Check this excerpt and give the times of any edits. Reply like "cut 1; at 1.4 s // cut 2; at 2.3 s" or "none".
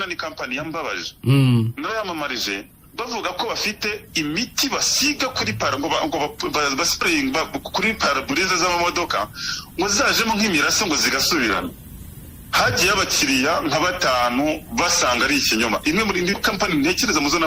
none